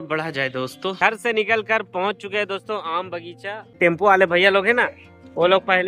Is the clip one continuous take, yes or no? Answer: no